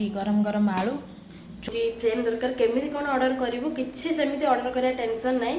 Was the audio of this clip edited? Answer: yes; 1 cut; at 1.7 s

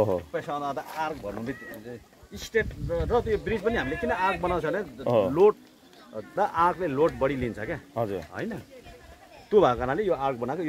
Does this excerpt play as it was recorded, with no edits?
yes; 0 cuts

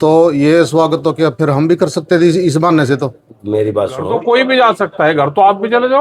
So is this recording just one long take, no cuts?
no; 1 cut; at 4.1 s

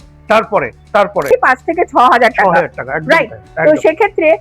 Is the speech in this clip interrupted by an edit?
yes; 1 cut; at 1.3 s

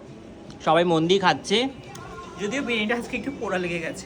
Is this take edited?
no; 0 cuts

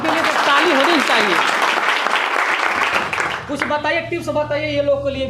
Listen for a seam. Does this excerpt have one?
no; 0 cuts

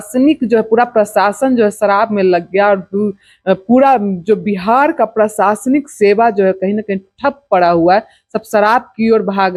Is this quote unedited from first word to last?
yes; 0 cuts

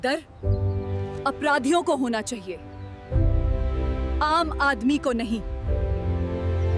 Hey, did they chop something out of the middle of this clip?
no; 0 cuts

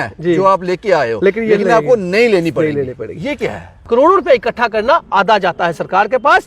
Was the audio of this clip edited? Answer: yes; 1 cut; at 3.7 s

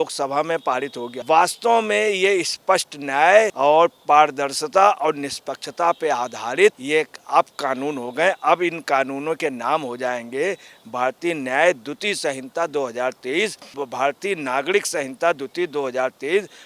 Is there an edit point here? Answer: yes; 3 cuts; at 1.1 s, 3.5 s, 6.8 s

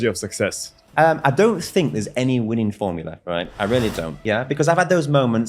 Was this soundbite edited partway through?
yes; 2 cuts; at 0.8 s, 4.2 s

